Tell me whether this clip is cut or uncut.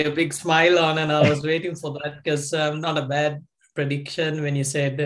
uncut